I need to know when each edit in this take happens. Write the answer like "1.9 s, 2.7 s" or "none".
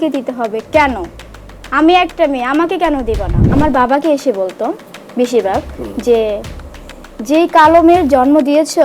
3.4 s